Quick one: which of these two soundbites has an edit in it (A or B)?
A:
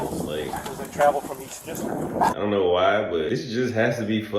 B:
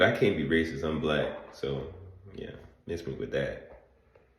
A